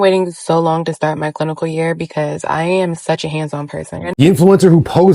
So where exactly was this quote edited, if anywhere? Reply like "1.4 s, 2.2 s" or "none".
4.0 s